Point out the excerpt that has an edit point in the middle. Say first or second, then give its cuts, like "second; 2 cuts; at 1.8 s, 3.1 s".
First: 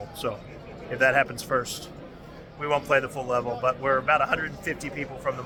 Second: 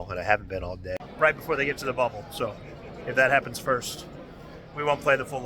second; 1 cut; at 1.1 s